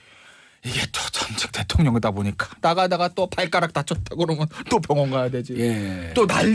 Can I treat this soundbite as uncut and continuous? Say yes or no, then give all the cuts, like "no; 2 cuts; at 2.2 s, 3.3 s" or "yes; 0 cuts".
no; 1 cut; at 4.4 s